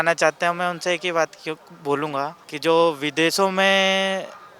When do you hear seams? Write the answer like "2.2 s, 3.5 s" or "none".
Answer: 2.4 s

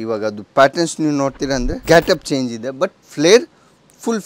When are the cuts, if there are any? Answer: 1.7 s

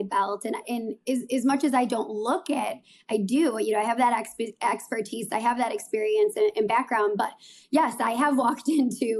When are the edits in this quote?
none

